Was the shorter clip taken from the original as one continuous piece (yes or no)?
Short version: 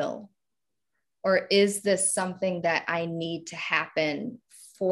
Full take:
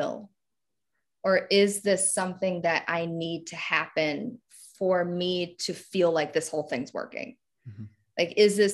yes